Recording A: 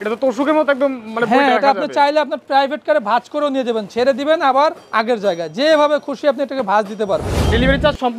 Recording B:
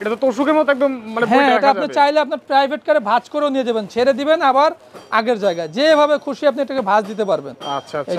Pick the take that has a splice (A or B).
A